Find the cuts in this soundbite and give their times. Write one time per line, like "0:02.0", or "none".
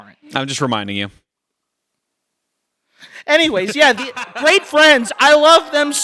none